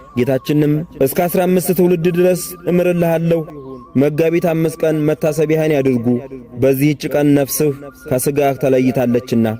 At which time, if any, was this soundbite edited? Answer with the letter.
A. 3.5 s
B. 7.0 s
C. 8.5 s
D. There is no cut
A